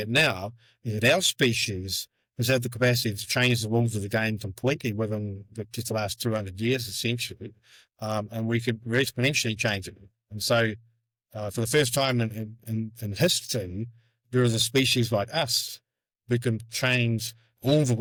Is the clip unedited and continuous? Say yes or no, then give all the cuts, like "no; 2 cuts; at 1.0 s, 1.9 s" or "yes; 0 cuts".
yes; 0 cuts